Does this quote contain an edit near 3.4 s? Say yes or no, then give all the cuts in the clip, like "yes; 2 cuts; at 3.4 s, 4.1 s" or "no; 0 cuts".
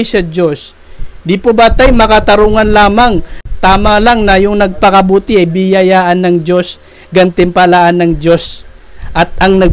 yes; 1 cut; at 3.4 s